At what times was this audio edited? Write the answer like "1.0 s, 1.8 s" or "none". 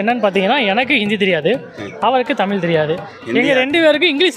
none